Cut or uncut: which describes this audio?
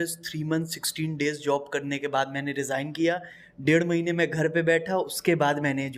uncut